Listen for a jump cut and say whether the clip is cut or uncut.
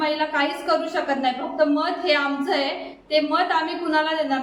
uncut